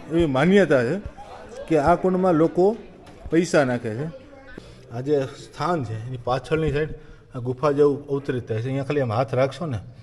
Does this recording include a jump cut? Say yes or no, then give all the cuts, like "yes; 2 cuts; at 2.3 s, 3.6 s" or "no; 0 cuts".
yes; 1 cut; at 4.5 s